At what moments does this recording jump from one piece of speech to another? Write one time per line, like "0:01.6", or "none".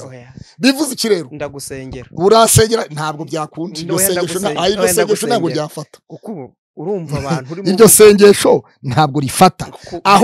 none